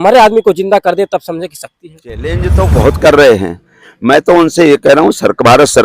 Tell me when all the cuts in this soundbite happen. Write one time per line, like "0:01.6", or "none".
0:02.3

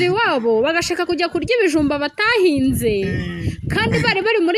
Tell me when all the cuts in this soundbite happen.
none

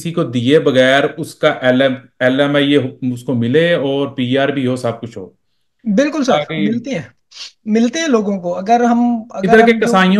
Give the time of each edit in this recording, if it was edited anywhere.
none

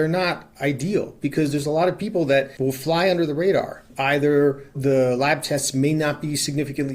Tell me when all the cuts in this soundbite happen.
0:02.5

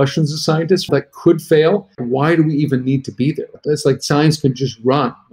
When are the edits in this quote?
0:00.9
0:02.0
0:03.6

